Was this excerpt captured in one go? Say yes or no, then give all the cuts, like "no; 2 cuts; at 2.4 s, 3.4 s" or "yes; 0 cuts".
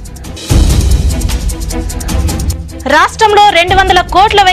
yes; 0 cuts